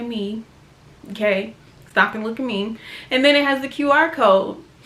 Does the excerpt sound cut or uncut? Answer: uncut